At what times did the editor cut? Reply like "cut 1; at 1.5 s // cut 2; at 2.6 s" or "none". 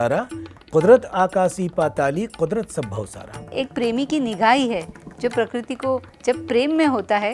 cut 1; at 3.5 s